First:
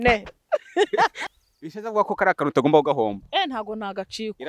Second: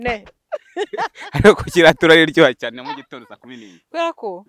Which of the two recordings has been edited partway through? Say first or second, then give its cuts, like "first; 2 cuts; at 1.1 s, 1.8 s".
first; 1 cut; at 1.2 s